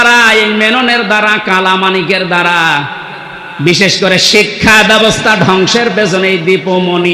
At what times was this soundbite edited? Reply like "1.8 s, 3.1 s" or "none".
none